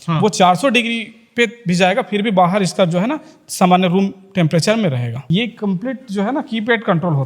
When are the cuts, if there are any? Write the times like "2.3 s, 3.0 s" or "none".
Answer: 5.2 s